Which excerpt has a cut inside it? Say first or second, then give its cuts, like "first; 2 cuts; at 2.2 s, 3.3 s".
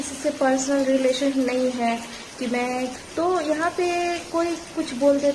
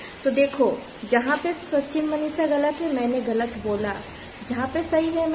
first; 1 cut; at 3.0 s